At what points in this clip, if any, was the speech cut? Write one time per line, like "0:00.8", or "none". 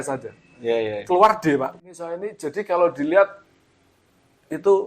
0:02.1

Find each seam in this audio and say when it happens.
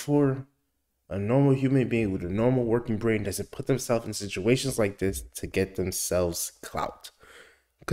none

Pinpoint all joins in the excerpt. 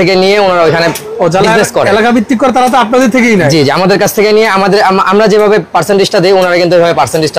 none

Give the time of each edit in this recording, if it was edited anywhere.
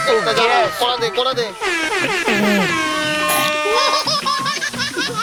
none

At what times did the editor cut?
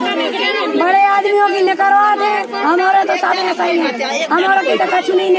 none

